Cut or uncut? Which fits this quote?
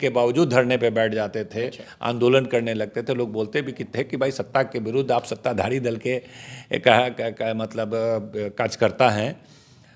uncut